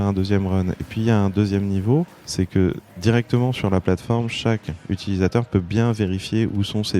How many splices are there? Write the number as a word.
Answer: one